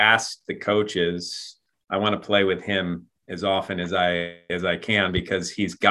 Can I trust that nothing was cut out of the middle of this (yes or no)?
no